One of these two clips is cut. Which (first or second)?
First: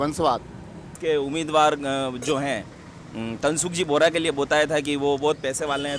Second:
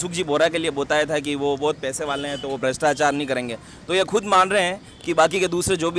first